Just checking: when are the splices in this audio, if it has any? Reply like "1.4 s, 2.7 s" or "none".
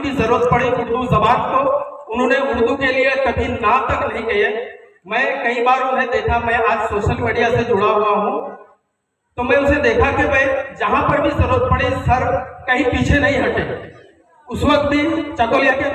none

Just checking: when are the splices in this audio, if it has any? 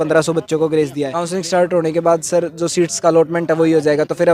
1.1 s

